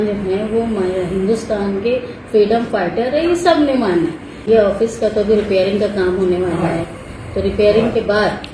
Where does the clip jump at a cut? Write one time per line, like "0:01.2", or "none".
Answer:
none